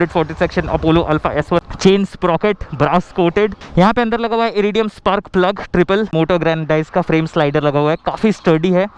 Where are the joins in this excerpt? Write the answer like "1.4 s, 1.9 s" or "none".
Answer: 1.6 s, 3.6 s, 6.1 s